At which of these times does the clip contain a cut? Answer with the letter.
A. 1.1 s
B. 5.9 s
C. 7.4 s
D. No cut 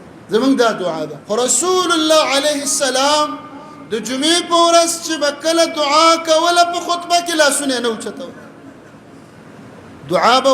A